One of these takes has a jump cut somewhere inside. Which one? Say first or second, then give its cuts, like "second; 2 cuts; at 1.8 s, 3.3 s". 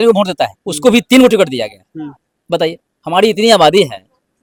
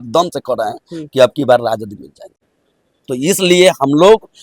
second; 1 cut; at 2.4 s